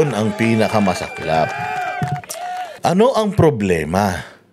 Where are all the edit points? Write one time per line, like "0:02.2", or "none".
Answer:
0:02.7